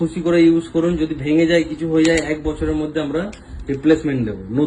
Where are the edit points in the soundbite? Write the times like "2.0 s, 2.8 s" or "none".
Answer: none